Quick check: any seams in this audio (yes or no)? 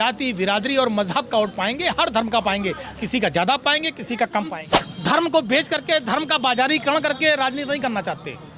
yes